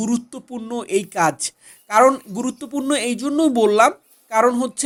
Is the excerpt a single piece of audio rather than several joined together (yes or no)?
yes